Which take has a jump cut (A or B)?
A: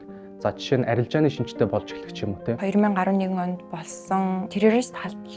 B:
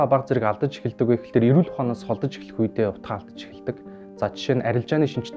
A